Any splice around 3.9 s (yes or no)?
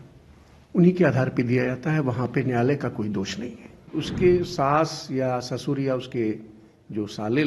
yes